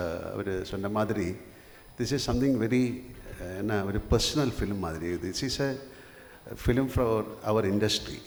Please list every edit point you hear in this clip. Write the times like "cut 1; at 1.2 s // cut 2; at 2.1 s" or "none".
none